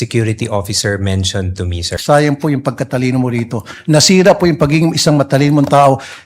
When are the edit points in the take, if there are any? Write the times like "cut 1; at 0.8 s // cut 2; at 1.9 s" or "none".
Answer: cut 1; at 2.0 s